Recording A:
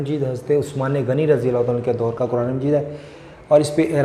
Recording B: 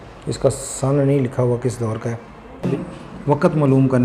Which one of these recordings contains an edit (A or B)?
B